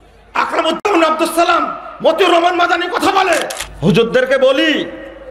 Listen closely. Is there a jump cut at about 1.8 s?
no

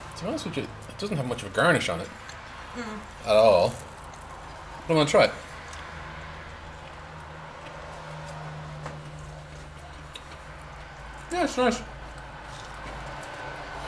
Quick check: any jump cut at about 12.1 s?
no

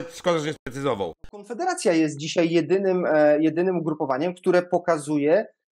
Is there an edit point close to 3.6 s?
no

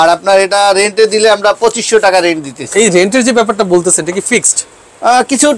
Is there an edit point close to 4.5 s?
no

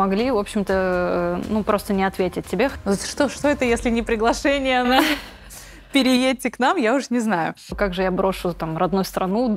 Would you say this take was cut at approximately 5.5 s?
no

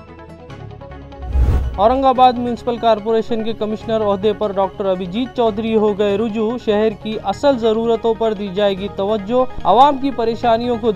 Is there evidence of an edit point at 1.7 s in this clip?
yes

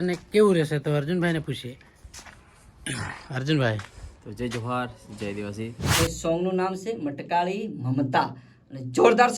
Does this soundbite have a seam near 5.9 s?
yes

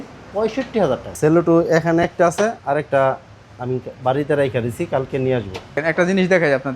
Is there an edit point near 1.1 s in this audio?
yes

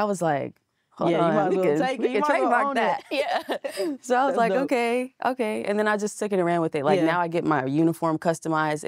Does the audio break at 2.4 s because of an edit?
no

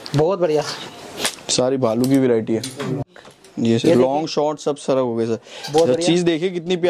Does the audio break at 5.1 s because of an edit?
no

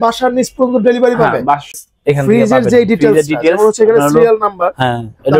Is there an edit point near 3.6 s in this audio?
no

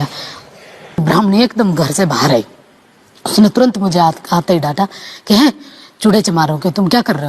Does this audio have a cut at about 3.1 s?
no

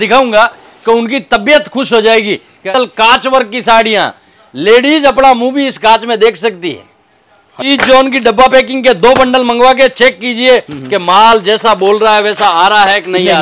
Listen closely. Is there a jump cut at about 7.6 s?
yes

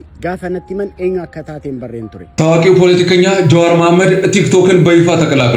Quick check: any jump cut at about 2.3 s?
yes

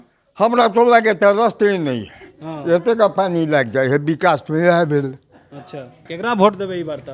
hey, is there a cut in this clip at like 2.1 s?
no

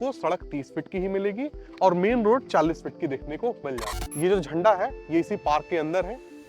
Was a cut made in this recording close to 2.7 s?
no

